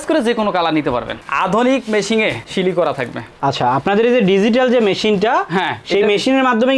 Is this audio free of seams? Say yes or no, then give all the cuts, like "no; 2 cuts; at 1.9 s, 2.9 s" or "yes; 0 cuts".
no; 1 cut; at 1.2 s